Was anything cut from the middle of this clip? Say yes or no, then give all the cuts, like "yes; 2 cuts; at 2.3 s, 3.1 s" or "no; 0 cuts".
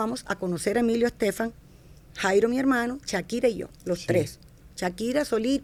no; 0 cuts